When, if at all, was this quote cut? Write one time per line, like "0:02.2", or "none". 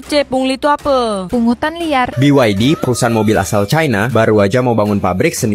0:02.1

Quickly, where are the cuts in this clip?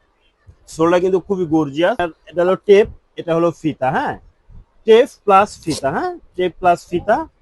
0:02.2

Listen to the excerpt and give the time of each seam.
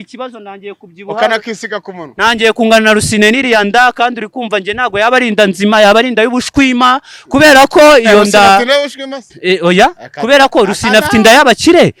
none

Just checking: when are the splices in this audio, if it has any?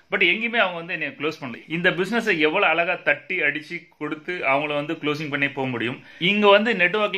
0:01.5
0:06.1

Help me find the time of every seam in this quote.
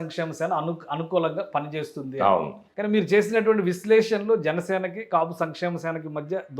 0:02.6

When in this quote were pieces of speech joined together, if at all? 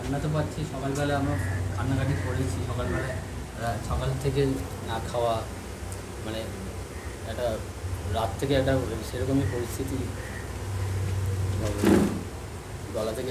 none

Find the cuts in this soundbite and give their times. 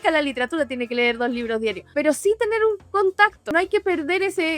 0:01.8
0:03.2

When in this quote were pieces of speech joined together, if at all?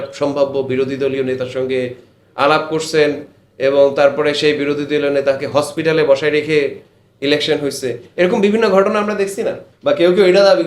0:09.7

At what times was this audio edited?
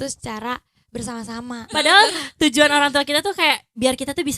0:01.7

